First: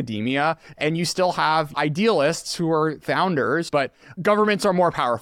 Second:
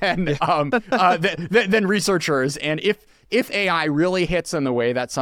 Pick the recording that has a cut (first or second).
first